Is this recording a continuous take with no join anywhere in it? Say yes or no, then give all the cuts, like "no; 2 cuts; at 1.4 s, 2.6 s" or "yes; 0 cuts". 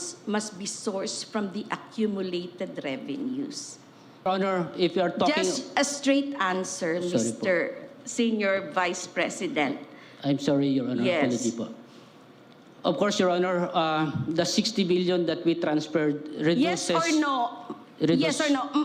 no; 1 cut; at 4.3 s